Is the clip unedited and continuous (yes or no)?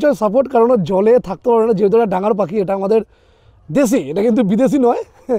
yes